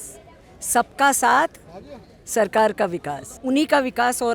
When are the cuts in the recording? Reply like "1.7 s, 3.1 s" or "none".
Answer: 3.3 s